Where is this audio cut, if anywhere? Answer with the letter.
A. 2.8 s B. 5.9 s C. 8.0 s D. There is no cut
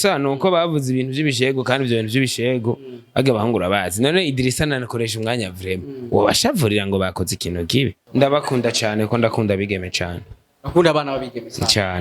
C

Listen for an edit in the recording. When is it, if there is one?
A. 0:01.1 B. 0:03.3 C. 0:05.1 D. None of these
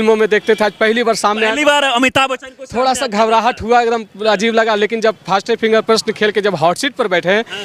D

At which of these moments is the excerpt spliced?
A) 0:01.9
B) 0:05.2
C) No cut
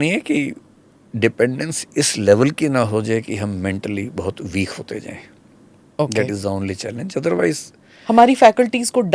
C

